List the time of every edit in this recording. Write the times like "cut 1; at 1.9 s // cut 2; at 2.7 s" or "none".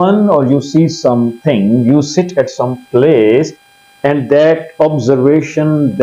none